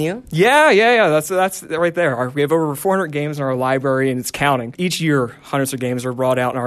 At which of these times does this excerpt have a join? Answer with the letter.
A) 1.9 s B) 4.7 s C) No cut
B